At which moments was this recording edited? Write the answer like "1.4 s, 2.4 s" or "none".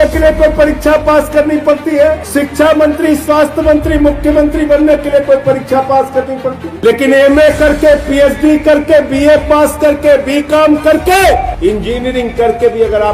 2.2 s, 6.7 s, 11.5 s